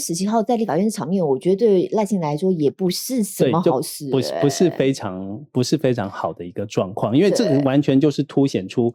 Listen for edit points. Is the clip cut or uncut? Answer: uncut